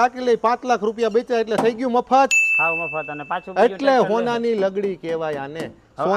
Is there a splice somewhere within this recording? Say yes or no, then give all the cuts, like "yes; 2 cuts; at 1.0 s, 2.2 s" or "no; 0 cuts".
no; 0 cuts